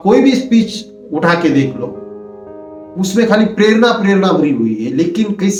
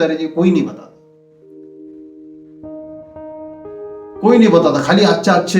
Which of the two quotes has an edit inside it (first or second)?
second